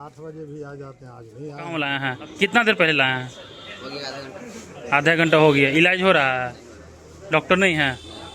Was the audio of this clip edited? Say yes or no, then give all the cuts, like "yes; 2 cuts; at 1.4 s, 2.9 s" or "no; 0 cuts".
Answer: yes; 1 cut; at 1.9 s